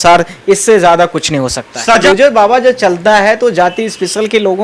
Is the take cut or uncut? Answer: cut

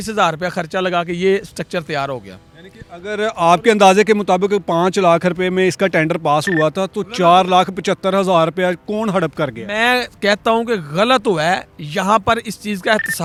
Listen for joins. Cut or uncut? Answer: uncut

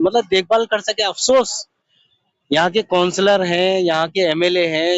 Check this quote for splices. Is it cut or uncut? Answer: uncut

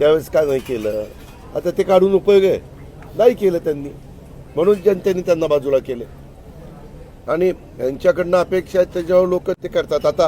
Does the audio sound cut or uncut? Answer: uncut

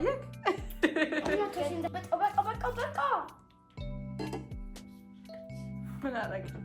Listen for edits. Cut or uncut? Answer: cut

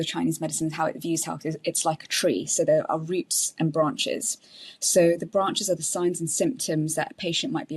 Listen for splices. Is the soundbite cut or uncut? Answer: uncut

